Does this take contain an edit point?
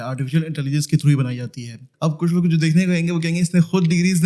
yes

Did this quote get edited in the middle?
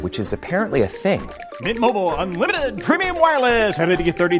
no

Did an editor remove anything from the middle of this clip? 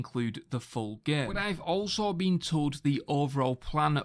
yes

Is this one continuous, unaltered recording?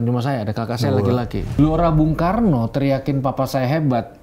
no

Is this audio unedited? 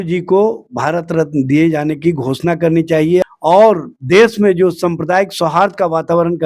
no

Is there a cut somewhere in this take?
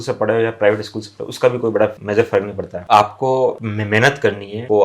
yes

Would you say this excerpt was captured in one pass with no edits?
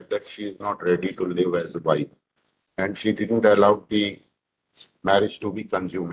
yes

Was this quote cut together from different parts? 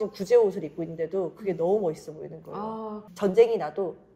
yes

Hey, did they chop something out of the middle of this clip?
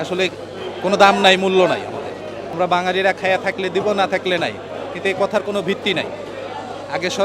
yes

